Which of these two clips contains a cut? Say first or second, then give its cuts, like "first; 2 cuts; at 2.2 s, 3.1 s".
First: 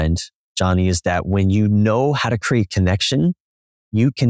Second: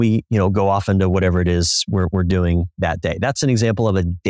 second; 1 cut; at 3.4 s